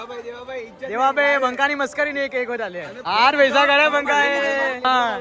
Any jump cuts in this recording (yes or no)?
yes